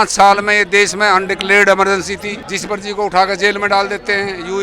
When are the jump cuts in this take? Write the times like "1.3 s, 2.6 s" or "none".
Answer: 2.4 s

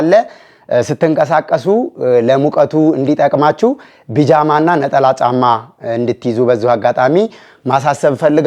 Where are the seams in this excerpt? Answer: none

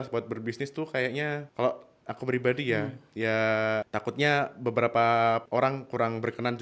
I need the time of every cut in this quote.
1.5 s, 3.9 s, 5.4 s

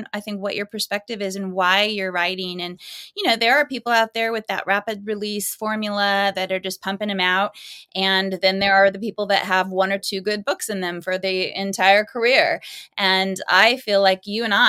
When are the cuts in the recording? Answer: 5.1 s

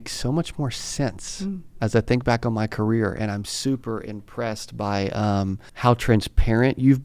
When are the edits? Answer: 5.7 s

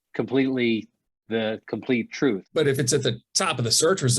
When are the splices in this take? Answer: 2.4 s

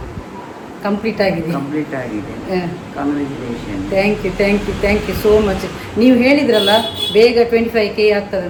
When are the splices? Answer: none

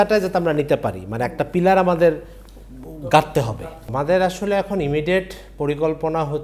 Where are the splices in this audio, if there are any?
none

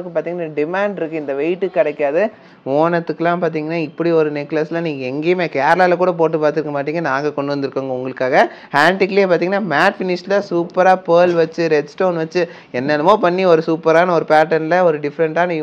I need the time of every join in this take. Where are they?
2.4 s

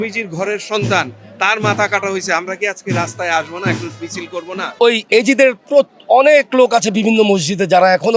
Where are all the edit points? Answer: 4.7 s

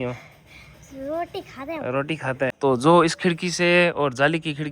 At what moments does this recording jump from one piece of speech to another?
2.5 s

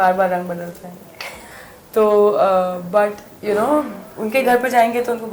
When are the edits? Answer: none

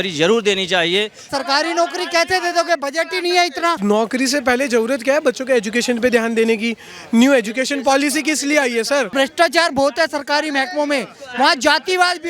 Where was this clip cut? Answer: 1.3 s, 3.8 s, 9.1 s

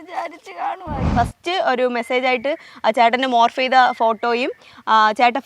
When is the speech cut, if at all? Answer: 1.1 s

